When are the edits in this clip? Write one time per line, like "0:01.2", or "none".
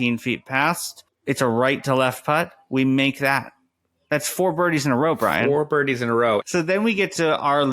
0:06.4